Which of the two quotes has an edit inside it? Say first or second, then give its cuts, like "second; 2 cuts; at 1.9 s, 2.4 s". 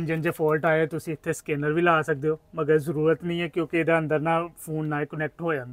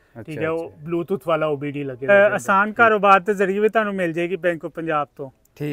second; 1 cut; at 2.1 s